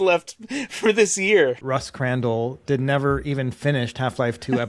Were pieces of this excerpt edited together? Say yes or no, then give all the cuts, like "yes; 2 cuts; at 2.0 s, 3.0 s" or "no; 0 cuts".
yes; 1 cut; at 1.6 s